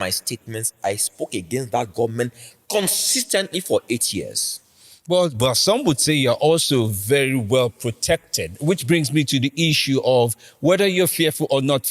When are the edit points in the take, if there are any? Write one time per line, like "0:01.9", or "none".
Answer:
none